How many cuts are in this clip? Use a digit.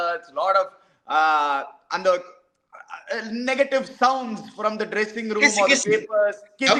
0